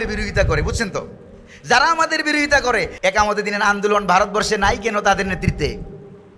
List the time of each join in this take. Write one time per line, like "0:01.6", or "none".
0:02.9

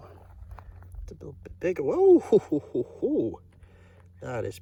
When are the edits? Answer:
none

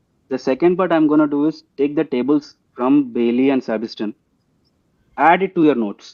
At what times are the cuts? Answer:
none

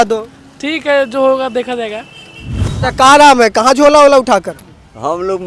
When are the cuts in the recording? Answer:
0:02.8

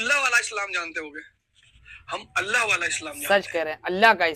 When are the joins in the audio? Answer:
none

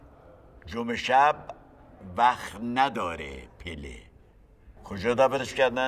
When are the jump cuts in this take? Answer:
0:04.7

